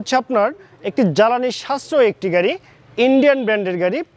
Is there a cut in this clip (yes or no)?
no